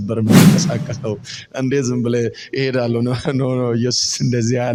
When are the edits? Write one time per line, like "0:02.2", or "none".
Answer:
none

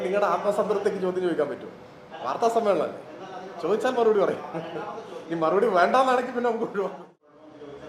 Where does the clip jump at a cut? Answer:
0:07.0

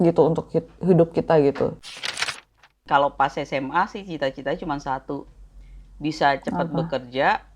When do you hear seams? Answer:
0:02.3

